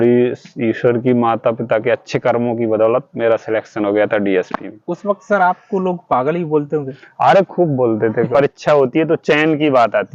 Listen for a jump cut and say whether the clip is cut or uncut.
cut